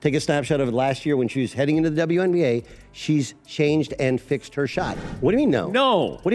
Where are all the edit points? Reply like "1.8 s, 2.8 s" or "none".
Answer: 5.0 s